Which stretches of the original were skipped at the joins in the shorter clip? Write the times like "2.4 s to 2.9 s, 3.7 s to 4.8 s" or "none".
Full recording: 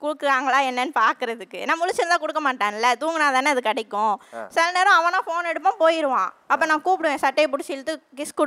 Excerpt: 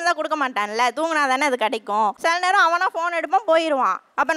4.2 s to 4.5 s